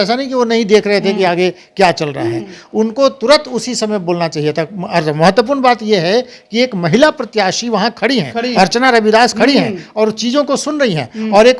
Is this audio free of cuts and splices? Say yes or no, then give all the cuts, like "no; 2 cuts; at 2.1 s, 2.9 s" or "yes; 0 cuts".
yes; 0 cuts